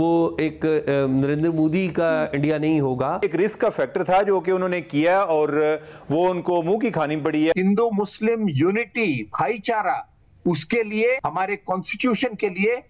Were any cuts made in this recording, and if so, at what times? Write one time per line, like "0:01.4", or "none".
0:03.2
0:07.5
0:11.2

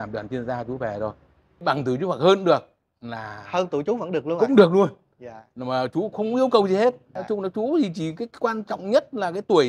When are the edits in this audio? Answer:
0:01.6
0:07.1

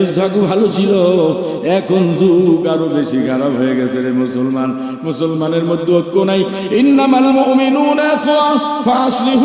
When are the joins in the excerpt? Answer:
none

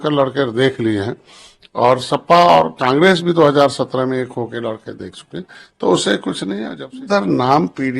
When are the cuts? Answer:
0:06.8

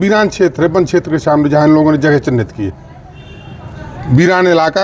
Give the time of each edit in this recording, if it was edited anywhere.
none

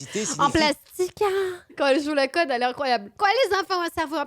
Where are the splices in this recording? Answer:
0:01.7

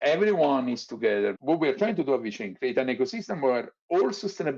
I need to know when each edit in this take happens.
0:01.4

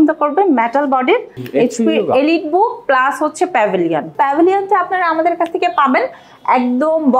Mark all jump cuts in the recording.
0:01.4
0:04.1

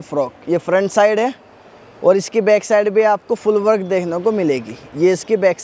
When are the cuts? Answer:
none

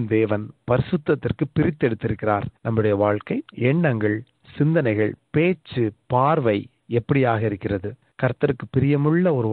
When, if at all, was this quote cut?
0:02.5
0:03.5
0:08.0

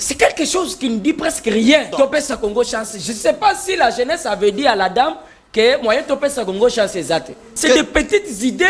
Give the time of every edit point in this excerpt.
0:01.9
0:07.5

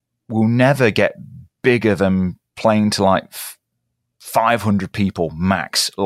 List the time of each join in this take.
none

